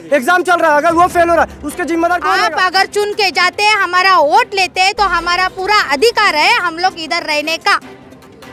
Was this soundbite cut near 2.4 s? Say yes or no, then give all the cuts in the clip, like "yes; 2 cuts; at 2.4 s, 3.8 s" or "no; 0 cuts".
yes; 1 cut; at 2.4 s